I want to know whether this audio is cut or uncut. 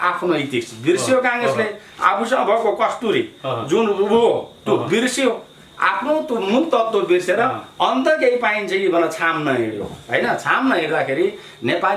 uncut